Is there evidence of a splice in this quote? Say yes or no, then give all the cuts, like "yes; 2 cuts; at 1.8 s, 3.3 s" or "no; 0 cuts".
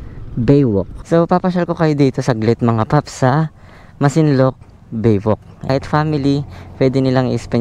yes; 2 cuts; at 1.0 s, 5.7 s